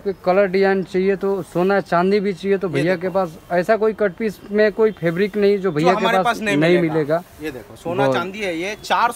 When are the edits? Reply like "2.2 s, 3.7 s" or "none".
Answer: none